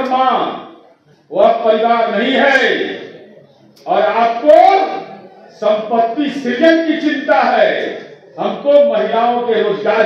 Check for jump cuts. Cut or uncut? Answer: uncut